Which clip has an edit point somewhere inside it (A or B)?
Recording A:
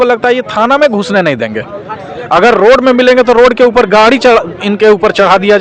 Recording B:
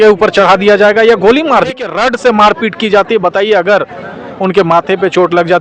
B